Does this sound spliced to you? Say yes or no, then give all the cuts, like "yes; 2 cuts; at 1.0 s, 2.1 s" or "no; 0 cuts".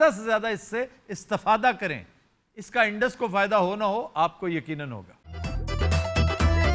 yes; 1 cut; at 5.3 s